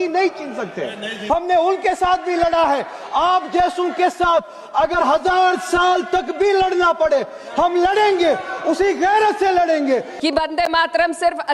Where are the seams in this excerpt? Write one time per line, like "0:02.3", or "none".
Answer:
0:01.2
0:10.1